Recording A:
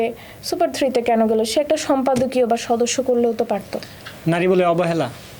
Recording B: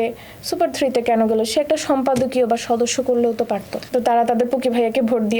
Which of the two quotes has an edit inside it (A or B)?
B